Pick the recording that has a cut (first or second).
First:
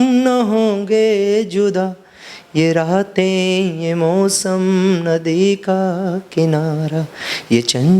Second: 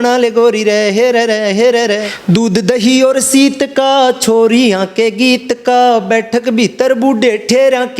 second